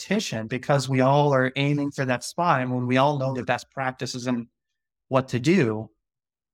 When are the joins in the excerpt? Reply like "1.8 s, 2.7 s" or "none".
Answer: none